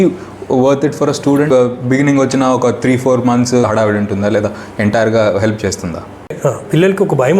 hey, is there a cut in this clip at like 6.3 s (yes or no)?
yes